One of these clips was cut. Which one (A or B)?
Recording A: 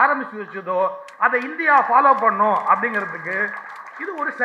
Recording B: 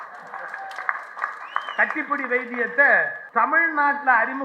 B